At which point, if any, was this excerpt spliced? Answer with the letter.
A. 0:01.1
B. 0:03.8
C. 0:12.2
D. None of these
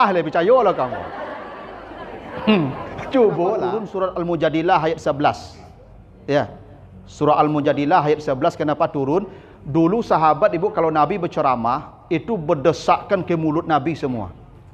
B